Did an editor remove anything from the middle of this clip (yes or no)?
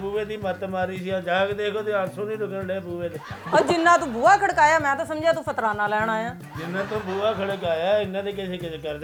no